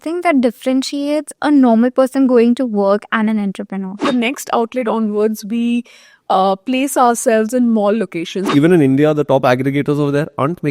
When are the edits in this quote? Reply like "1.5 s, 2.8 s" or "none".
4.0 s, 8.5 s